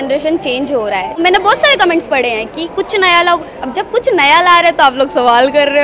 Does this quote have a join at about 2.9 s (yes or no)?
no